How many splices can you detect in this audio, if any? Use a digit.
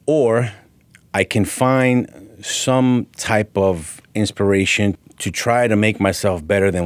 1